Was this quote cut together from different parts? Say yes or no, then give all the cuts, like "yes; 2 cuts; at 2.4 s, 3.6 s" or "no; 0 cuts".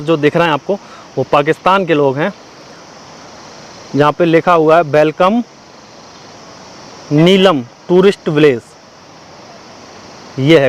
no; 0 cuts